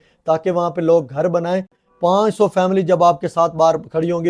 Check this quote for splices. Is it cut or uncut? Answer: cut